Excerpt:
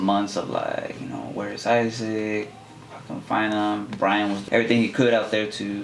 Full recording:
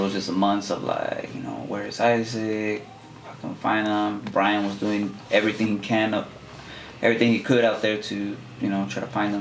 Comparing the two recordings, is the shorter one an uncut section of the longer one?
no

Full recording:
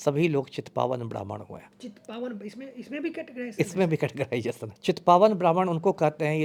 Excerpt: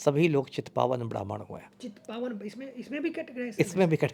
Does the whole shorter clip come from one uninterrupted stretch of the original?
yes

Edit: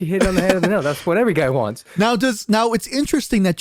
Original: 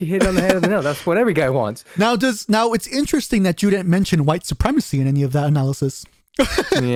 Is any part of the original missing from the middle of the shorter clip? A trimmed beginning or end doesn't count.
no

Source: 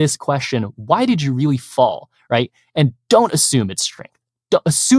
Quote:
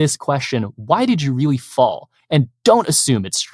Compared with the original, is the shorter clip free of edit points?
no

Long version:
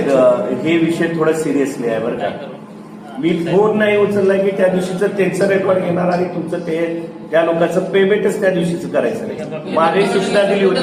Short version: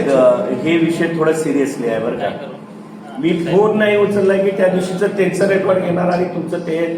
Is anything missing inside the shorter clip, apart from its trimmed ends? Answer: no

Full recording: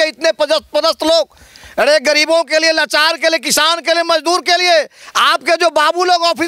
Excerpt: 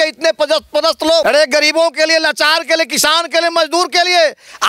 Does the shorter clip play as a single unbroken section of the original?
no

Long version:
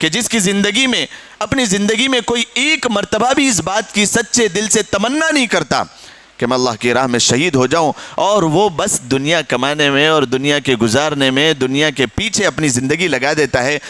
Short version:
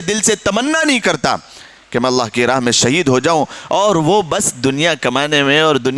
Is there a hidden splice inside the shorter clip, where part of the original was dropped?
no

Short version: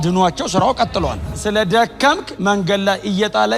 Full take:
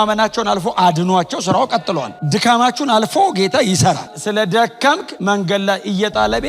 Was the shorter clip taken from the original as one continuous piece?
no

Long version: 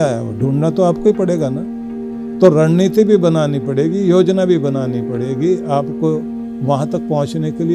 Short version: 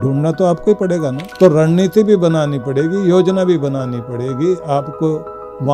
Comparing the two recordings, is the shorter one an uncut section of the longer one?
no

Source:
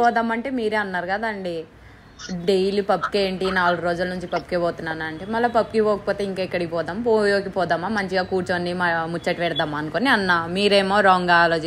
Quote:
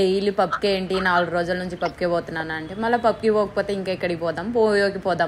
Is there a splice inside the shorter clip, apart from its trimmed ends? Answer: no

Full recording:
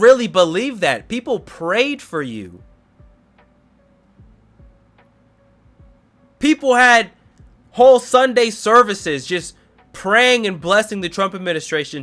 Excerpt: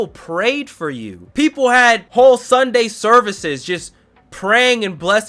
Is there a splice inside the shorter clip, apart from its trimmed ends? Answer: yes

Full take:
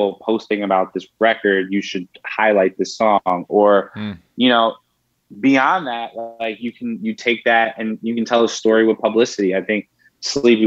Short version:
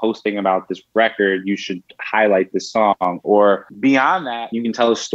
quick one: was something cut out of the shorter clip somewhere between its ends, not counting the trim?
yes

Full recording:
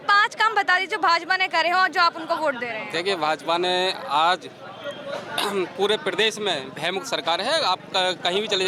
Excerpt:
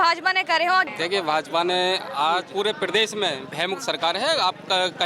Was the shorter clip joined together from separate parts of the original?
yes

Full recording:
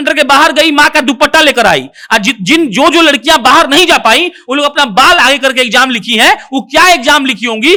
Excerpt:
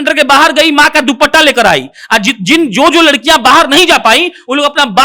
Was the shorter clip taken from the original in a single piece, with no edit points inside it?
yes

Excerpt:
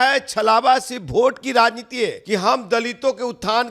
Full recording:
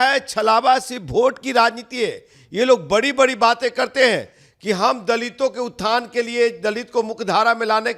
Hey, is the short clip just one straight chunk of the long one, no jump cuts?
no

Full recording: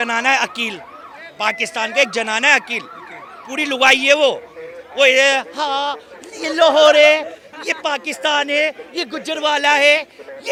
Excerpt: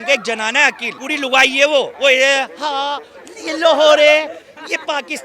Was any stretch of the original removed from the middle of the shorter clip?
yes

